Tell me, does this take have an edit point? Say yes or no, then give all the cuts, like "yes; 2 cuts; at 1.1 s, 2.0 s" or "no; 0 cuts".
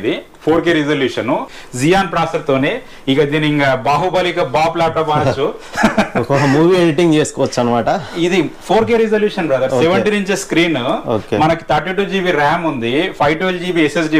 yes; 1 cut; at 1.6 s